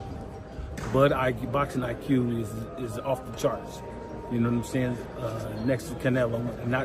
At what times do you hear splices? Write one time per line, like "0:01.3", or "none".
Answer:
none